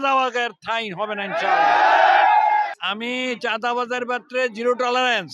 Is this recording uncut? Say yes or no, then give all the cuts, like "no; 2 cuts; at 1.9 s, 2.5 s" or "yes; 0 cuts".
no; 1 cut; at 2.7 s